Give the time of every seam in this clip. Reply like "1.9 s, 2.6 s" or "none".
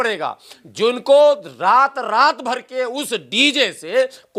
none